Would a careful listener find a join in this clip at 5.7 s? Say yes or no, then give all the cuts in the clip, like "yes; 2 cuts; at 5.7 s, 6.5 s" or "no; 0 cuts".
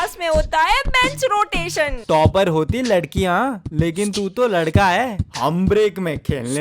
no; 1 cut; at 1.9 s